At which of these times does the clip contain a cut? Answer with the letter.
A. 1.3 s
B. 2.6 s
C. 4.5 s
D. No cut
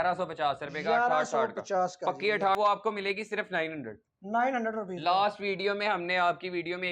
B